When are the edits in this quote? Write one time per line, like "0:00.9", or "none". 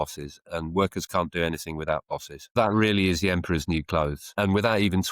0:02.5
0:04.3